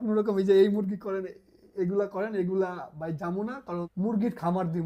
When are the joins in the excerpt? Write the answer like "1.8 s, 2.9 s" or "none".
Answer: 3.9 s